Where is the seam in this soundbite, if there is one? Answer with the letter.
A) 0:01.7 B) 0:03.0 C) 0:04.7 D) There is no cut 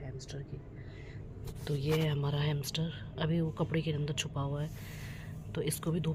D